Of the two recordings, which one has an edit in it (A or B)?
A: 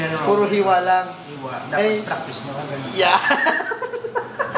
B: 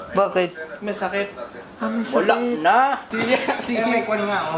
B